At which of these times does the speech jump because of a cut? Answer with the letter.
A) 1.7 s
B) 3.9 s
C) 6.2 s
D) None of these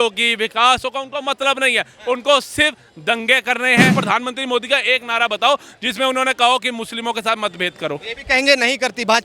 B